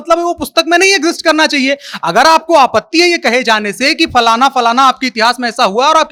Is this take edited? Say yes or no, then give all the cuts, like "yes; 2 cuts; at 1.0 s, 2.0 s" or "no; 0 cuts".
no; 0 cuts